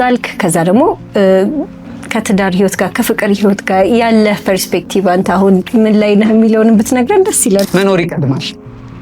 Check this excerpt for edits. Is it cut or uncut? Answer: cut